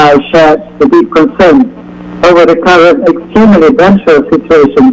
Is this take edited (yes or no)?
no